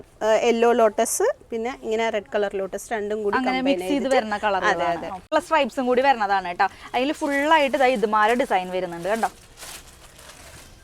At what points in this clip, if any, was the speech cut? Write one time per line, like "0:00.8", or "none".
0:05.3